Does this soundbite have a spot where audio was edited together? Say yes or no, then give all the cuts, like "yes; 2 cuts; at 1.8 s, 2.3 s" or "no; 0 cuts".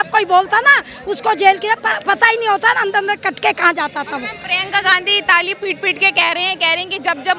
no; 0 cuts